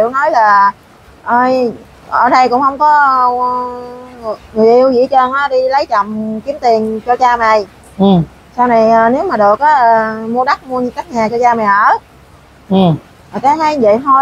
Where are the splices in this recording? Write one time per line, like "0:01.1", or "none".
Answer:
none